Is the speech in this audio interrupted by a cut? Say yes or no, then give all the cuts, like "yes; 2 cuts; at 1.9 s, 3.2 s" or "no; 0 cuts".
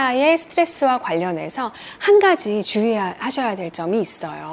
no; 0 cuts